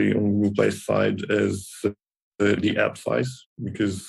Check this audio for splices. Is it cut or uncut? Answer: uncut